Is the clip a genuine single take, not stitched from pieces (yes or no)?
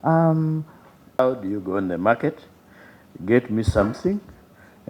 no